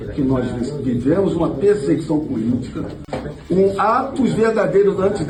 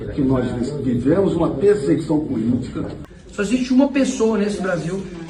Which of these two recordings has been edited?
second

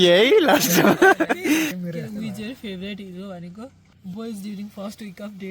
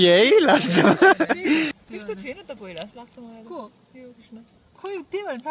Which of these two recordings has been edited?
first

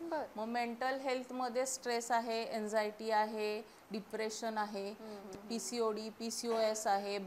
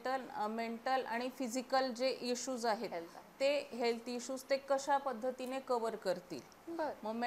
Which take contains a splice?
first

